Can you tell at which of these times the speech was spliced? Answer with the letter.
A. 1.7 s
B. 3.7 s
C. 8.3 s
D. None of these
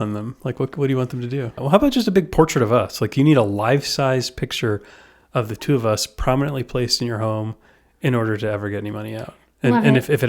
A